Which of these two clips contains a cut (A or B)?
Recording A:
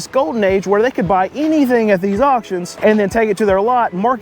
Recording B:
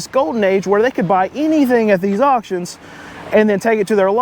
A